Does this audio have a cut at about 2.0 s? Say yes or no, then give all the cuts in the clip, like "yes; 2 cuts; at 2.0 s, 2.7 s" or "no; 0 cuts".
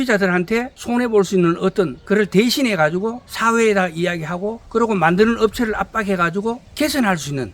no; 2 cuts; at 3.3 s, 4.6 s